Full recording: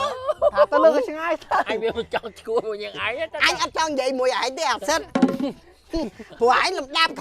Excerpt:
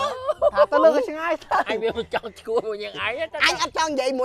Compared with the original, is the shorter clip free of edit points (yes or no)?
yes